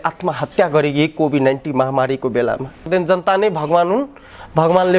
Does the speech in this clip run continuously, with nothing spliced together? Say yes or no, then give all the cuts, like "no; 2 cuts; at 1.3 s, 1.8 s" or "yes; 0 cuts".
no; 1 cut; at 2.9 s